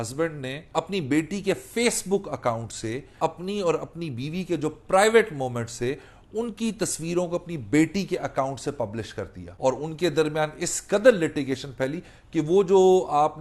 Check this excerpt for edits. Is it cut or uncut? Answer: cut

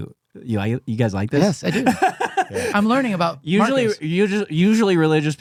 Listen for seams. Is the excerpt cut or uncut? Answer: uncut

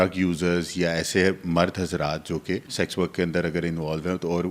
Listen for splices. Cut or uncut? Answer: cut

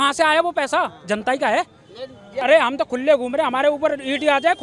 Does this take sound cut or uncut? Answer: uncut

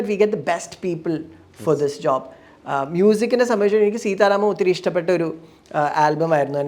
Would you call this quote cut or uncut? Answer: uncut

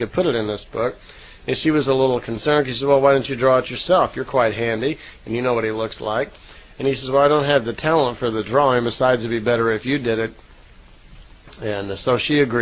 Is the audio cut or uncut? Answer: cut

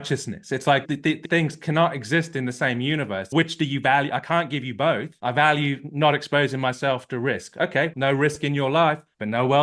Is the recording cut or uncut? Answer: cut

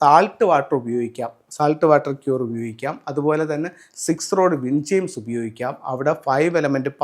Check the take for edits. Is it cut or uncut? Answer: uncut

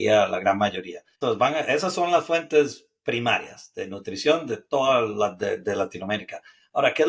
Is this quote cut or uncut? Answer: cut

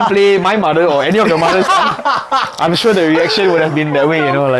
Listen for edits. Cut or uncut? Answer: uncut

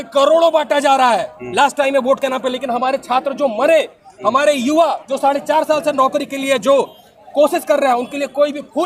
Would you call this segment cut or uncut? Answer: uncut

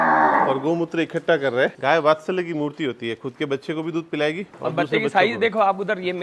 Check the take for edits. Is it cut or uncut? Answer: cut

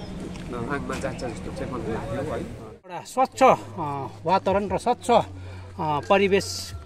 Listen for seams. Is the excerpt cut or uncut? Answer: cut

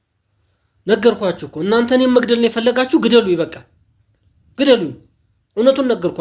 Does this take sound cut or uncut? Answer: uncut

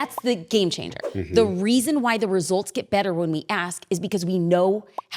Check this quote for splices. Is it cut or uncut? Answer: cut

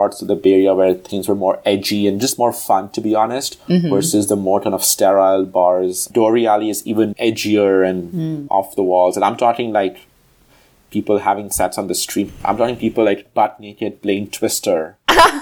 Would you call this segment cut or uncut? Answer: cut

